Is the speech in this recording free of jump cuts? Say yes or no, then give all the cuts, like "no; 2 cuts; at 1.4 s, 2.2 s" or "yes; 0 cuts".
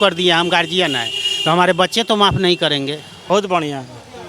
no; 1 cut; at 3.3 s